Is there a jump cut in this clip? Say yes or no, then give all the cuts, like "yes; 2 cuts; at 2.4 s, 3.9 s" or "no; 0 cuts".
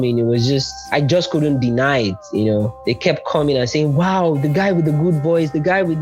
yes; 2 cuts; at 0.9 s, 2.8 s